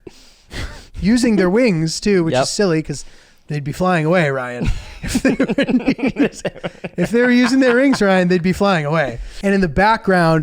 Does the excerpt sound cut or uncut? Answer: cut